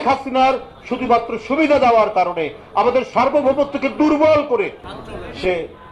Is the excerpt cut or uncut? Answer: cut